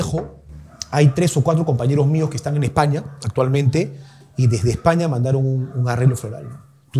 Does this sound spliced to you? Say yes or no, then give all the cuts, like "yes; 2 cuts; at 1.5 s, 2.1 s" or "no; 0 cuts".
no; 0 cuts